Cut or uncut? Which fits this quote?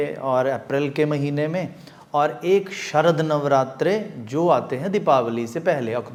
uncut